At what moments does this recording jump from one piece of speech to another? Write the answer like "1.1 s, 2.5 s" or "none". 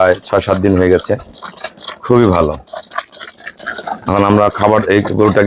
3.6 s